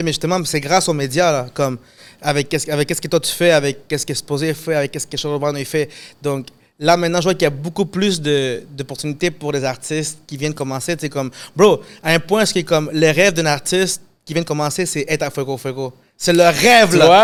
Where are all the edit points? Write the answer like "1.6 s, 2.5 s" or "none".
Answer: none